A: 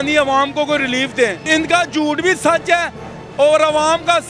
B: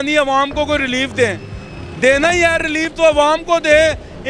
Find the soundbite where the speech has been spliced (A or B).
A